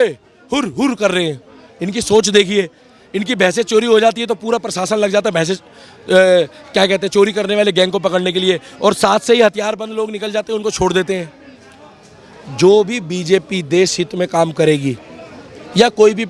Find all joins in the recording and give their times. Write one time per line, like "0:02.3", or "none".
none